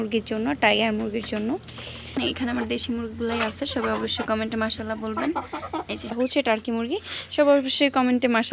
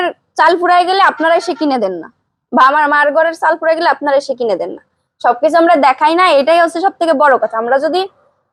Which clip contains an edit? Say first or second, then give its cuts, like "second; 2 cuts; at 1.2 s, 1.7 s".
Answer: first; 2 cuts; at 2.2 s, 6.1 s